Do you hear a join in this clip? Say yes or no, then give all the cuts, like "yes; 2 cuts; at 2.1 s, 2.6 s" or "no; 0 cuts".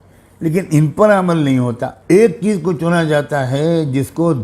yes; 1 cut; at 1.9 s